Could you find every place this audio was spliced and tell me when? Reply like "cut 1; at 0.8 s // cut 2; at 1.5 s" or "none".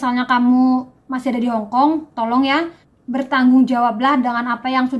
cut 1; at 3.0 s